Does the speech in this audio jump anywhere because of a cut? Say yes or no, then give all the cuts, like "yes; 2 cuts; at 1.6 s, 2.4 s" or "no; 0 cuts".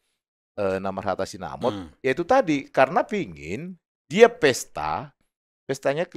no; 0 cuts